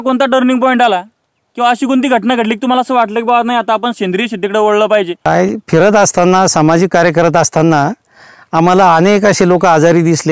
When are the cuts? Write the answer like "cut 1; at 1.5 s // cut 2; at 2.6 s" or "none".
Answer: cut 1; at 5.2 s